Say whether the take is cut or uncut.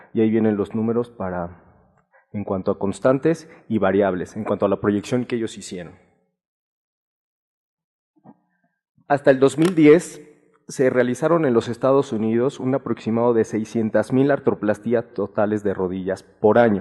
cut